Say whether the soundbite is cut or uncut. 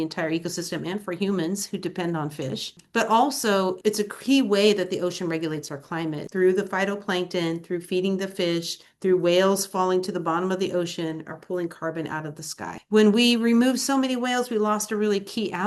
cut